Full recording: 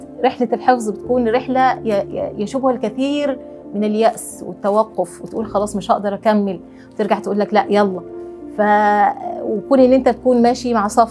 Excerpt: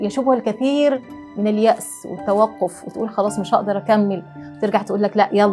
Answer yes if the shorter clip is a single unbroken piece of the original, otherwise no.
yes